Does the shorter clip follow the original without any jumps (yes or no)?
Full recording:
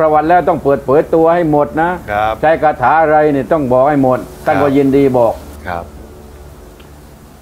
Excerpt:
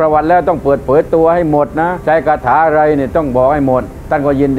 no